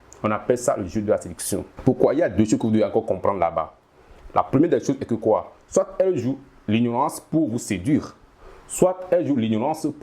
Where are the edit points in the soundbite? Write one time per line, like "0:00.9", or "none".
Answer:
0:01.7